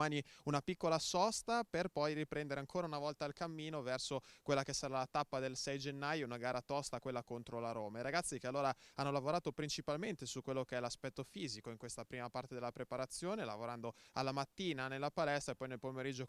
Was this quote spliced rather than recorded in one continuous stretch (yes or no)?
no